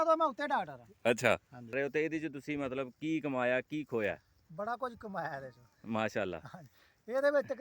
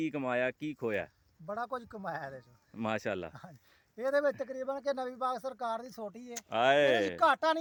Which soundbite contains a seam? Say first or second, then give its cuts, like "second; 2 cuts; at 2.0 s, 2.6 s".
first; 1 cut; at 1.7 s